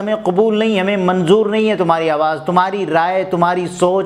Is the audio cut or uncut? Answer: uncut